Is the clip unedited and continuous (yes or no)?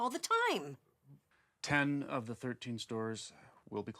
no